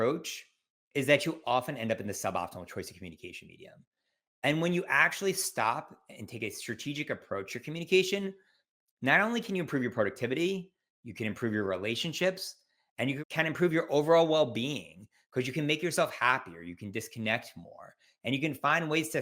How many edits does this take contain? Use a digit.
0